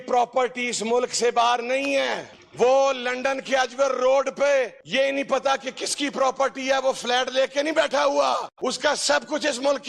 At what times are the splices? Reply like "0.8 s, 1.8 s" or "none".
4.8 s, 8.5 s